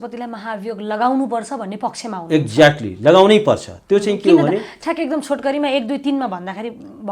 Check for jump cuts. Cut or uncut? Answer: uncut